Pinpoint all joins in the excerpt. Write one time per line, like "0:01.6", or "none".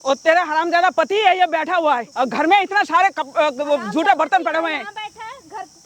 0:02.1